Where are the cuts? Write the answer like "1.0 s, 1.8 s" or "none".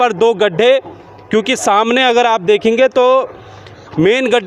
none